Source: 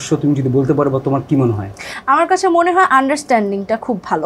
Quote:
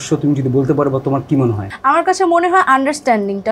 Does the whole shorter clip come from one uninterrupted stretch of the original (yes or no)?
no